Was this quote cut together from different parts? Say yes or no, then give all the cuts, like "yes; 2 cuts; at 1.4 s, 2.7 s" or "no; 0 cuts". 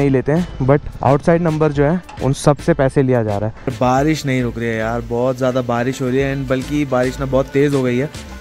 yes; 1 cut; at 3.7 s